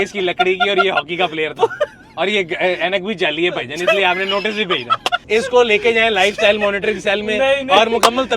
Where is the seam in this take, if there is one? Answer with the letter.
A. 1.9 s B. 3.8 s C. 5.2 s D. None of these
C